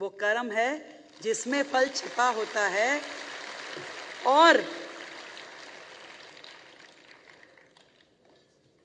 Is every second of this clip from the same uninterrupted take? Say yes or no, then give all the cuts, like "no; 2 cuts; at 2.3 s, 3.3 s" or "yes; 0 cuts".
yes; 0 cuts